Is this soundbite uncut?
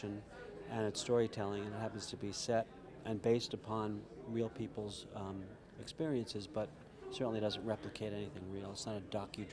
no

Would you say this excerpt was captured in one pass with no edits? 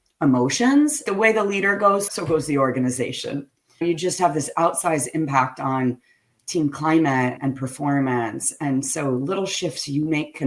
no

